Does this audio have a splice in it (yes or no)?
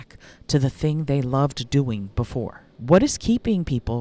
yes